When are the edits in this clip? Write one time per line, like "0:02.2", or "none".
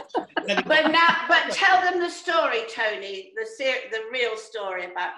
none